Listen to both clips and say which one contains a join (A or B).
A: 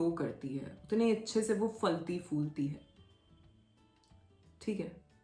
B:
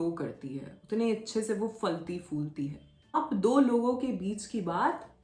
B